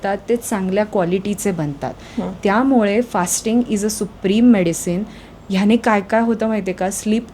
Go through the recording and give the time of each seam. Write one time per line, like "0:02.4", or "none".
none